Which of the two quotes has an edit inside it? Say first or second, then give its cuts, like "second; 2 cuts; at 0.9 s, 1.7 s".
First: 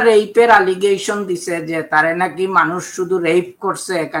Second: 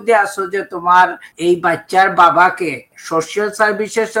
second; 2 cuts; at 1.3 s, 3.0 s